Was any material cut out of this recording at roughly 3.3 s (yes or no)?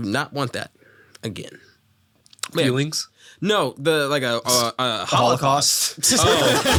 no